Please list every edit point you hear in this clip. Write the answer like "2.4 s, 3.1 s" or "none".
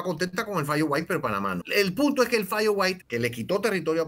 1.6 s, 3.0 s